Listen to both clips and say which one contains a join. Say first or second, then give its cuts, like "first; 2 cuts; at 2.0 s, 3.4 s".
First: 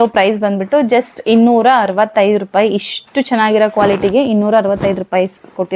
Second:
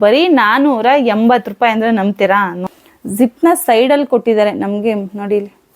second; 1 cut; at 2.6 s